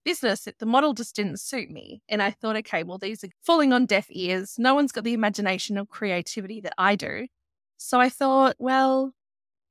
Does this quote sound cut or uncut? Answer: cut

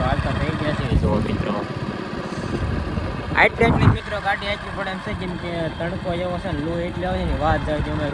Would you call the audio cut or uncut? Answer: uncut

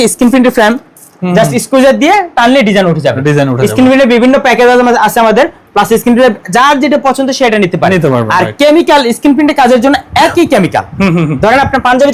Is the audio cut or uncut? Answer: uncut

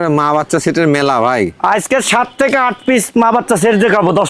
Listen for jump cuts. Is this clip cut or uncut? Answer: uncut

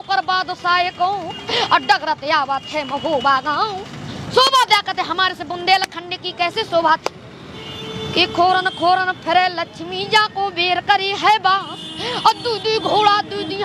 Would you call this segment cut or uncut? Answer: uncut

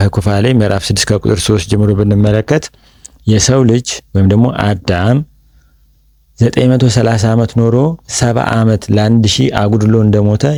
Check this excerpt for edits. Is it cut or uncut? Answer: uncut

